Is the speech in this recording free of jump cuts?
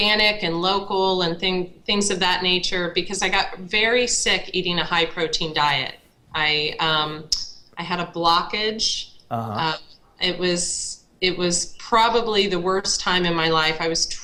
yes; 0 cuts

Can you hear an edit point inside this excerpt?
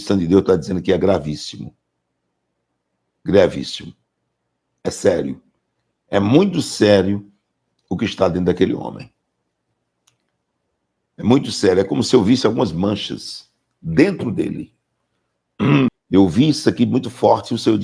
yes; 1 cut; at 15.9 s

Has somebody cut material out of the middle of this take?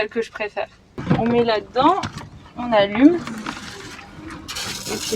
yes; 1 cut; at 1.0 s

